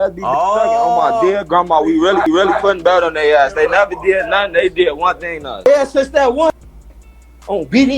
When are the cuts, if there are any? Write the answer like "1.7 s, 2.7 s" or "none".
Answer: 2.3 s